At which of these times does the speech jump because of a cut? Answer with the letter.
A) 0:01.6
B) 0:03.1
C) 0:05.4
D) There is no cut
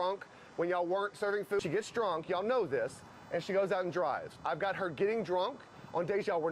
A